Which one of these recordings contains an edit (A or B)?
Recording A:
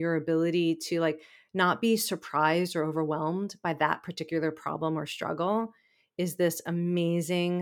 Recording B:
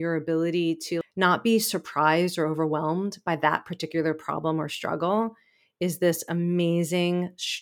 B